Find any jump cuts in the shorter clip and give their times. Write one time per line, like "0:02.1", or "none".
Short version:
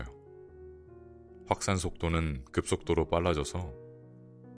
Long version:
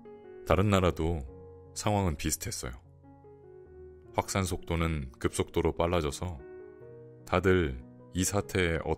none